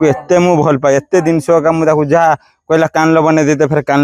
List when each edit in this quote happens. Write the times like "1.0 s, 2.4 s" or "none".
none